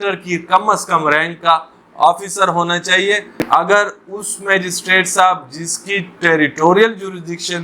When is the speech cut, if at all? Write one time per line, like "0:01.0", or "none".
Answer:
0:03.3